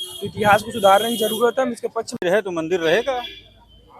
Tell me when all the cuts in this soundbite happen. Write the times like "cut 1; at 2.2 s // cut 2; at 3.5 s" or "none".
cut 1; at 2.2 s